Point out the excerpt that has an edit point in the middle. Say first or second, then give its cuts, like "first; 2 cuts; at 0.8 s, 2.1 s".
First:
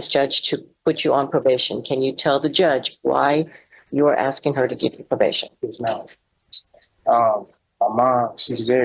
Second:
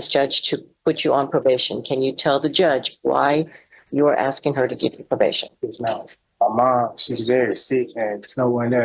second; 1 cut; at 6.2 s